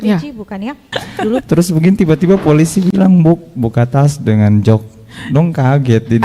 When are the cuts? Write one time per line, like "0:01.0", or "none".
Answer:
0:01.4